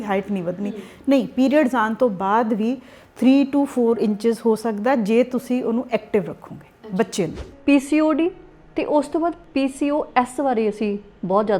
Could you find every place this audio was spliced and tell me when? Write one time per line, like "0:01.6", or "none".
0:07.5
0:09.4